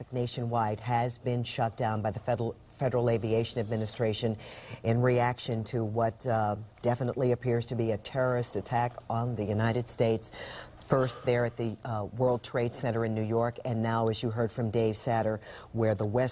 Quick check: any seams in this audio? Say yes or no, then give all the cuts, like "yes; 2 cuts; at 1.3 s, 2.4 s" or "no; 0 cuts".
no; 0 cuts